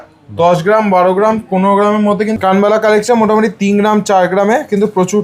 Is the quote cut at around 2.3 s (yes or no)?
yes